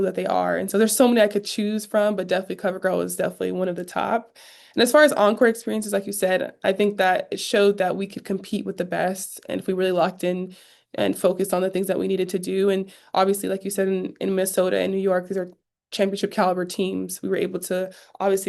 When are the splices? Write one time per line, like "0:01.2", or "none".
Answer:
none